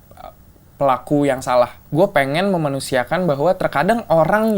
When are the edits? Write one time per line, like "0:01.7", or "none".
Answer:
0:01.8